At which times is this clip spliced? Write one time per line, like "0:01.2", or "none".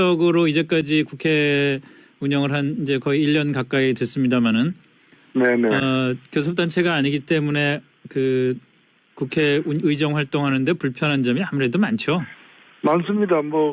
0:12.7